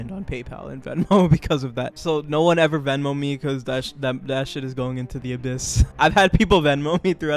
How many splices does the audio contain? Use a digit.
2